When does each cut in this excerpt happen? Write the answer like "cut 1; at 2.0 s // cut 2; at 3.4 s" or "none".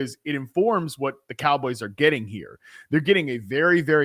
none